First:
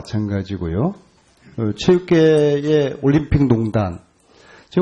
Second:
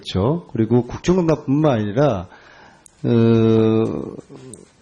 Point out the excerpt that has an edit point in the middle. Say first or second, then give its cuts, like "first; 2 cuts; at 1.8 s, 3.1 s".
first; 1 cut; at 2.6 s